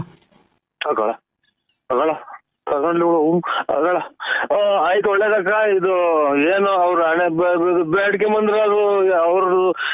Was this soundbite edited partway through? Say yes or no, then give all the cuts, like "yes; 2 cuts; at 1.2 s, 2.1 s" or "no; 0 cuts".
no; 0 cuts